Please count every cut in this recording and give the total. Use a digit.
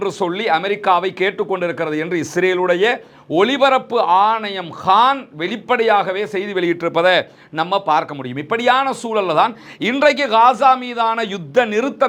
0